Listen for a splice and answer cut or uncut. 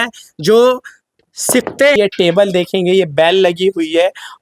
cut